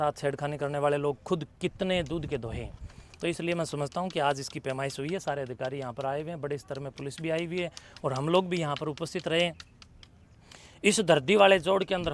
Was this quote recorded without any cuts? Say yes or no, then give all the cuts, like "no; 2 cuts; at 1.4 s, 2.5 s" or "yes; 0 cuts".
yes; 0 cuts